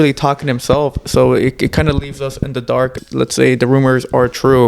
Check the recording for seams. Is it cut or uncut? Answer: cut